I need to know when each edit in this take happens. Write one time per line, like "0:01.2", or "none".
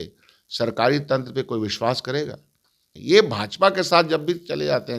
0:02.9